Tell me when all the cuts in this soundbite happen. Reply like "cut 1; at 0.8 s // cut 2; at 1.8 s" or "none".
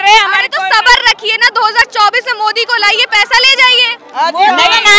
none